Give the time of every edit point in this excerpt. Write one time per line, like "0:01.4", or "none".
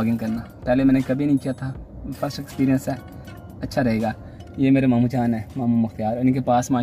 none